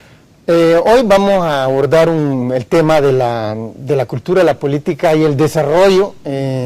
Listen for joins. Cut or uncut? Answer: cut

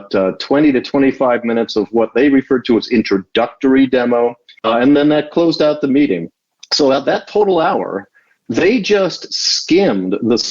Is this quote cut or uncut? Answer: cut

